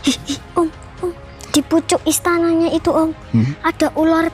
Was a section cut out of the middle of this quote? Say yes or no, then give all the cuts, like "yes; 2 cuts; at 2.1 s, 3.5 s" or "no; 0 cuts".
yes; 1 cut; at 1.3 s